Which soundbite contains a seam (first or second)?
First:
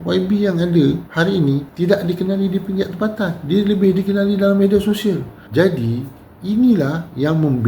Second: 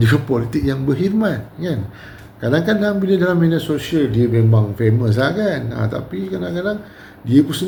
first